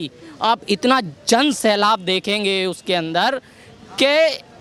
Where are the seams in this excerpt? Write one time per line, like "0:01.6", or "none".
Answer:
none